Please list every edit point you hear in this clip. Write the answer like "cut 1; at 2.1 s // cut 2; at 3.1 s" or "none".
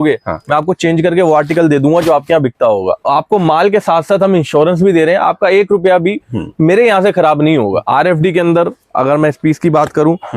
cut 1; at 3.0 s // cut 2; at 7.8 s